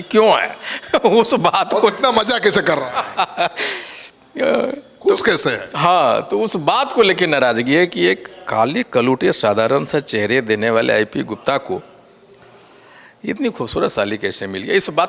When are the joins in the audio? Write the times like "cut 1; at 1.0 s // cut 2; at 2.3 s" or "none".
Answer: none